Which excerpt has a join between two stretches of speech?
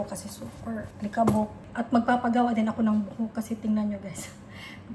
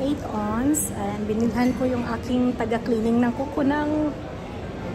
first; 2 cuts; at 0.9 s, 1.6 s

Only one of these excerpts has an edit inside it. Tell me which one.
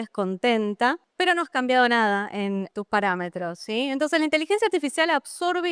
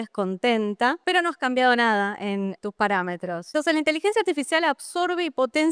second; 2 cuts; at 1.0 s, 3.5 s

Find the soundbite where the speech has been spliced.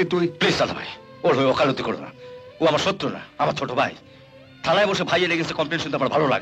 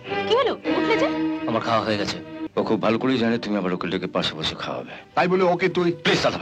second; 1 cut; at 2.4 s

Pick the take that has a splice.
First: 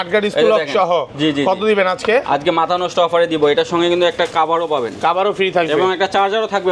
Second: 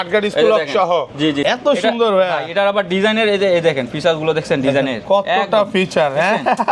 second; 1 cut; at 1.4 s

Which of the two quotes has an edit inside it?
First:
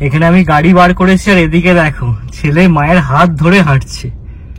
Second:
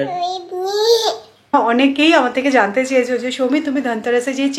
second; 1 cut; at 1.5 s

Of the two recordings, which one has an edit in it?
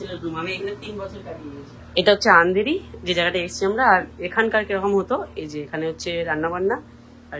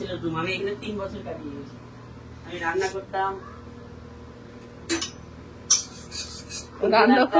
first; 1 cut; at 1.7 s

